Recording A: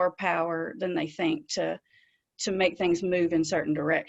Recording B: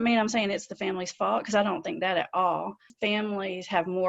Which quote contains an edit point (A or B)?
B